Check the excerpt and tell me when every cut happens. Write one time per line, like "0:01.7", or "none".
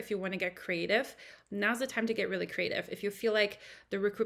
none

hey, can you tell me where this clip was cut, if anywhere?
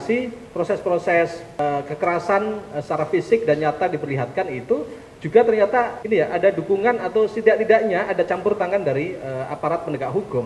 0:01.6
0:06.0

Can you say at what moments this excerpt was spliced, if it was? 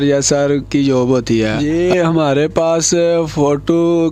0:01.6

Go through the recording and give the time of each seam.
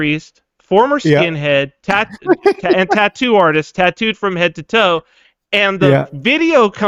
none

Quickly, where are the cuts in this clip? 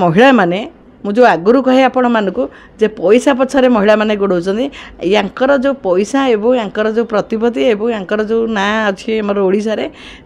none

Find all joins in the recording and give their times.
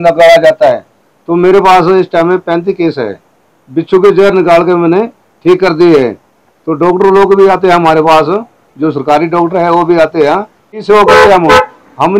0:10.8

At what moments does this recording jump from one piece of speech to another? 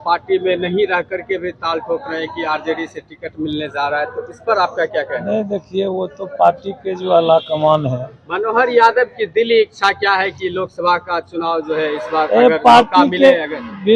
0:08.2

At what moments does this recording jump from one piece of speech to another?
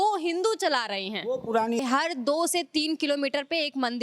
0:01.8

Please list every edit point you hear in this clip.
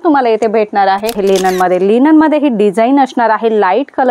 0:01.2

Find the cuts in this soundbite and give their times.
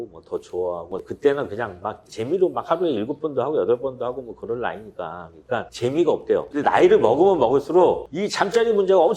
0:01.0
0:06.5

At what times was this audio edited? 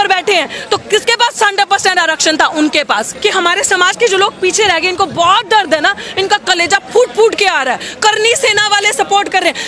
0:03.1

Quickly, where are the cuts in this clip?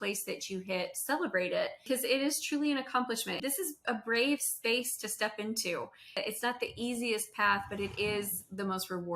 0:01.8
0:03.3
0:06.2

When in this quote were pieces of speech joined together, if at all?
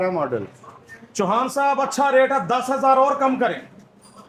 none

